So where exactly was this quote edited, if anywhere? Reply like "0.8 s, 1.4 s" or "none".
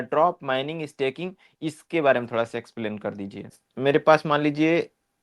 3.6 s